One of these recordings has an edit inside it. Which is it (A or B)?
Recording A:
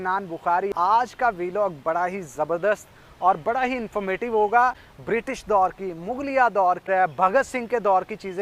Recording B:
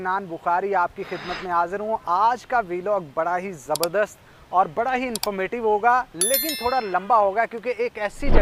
A